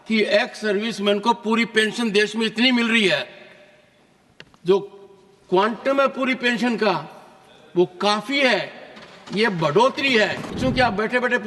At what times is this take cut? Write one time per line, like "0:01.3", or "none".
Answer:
0:10.5